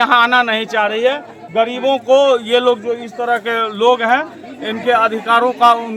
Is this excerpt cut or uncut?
uncut